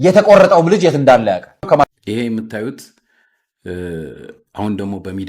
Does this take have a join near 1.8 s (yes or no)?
yes